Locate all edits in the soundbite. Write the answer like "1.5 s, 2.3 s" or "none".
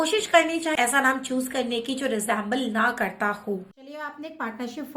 none